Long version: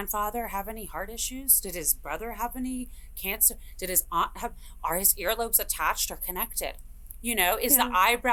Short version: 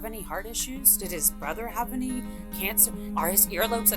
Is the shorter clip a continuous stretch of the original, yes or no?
no